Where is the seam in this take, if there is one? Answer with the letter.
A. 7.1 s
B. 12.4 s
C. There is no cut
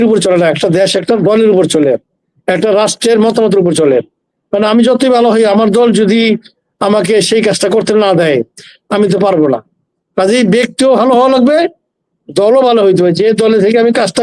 C